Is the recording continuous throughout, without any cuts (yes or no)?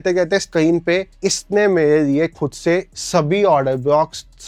yes